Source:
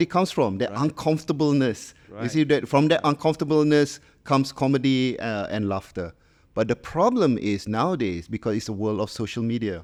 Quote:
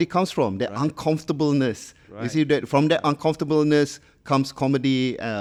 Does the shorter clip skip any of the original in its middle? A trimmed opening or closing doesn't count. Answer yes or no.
no